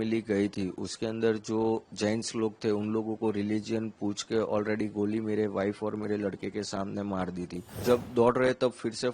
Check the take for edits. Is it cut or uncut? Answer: cut